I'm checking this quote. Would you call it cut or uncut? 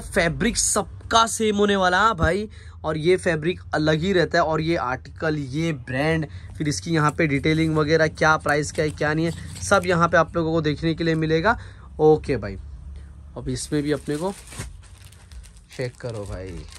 uncut